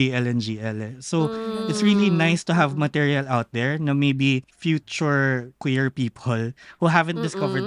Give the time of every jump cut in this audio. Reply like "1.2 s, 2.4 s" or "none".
4.4 s, 5.5 s